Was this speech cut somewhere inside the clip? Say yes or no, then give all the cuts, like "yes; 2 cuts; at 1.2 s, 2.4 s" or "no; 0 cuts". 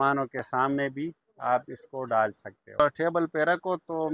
yes; 1 cut; at 2.8 s